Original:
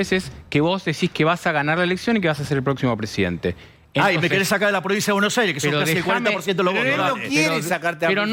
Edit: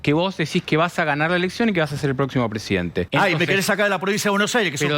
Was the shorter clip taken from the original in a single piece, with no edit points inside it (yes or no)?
no